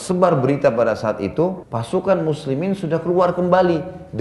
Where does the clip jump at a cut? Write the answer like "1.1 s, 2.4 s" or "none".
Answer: 1.7 s